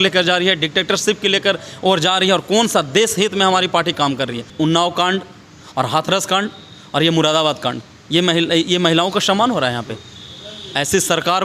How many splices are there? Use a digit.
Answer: 1